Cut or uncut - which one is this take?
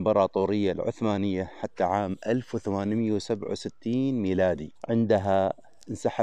cut